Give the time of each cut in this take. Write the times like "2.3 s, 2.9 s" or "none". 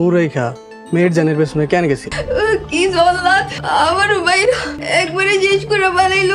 2.1 s, 3.5 s, 4.7 s